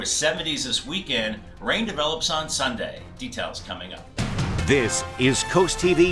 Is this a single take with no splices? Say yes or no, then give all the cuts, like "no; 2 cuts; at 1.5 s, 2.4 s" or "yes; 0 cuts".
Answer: no; 1 cut; at 4.0 s